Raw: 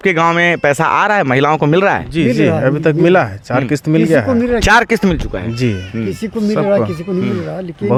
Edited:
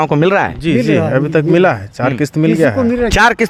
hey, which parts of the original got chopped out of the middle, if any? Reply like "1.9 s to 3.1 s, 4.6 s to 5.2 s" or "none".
none